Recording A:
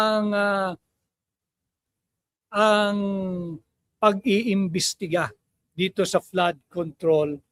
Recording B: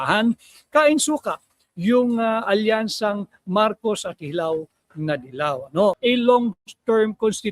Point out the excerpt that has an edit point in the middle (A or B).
B